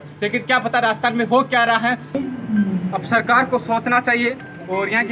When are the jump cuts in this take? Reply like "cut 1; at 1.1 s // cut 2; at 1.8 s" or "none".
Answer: cut 1; at 2.2 s